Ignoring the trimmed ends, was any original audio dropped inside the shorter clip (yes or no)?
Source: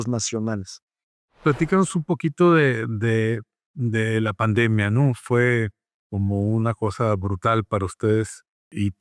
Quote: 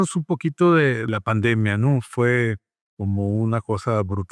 yes